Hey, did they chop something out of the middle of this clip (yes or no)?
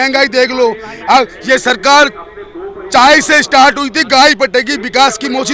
no